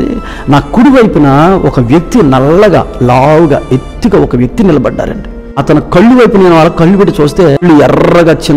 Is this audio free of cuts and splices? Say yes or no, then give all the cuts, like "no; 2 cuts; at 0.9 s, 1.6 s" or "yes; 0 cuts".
no; 2 cuts; at 5.6 s, 7.6 s